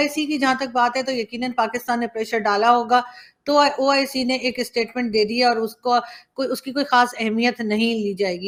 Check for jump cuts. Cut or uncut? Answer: uncut